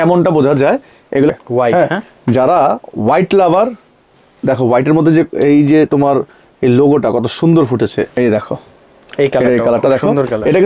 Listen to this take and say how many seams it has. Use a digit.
2